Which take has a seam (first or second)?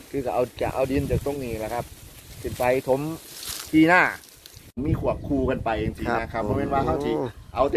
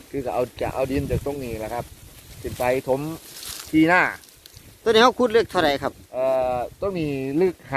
first